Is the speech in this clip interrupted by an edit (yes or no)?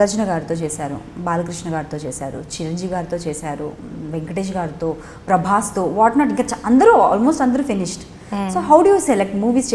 no